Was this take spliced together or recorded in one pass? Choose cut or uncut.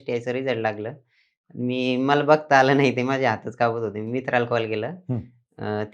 uncut